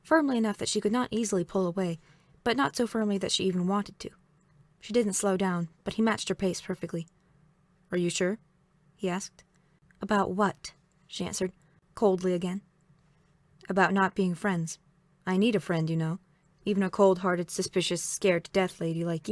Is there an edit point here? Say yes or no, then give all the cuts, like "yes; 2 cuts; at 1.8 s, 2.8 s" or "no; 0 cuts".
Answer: no; 0 cuts